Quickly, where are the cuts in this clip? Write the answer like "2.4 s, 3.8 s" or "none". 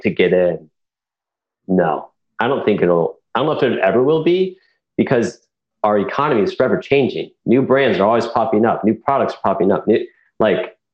5.6 s